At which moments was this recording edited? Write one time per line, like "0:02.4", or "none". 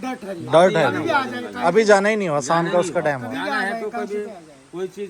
none